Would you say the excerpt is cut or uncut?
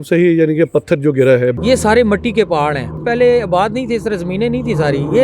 cut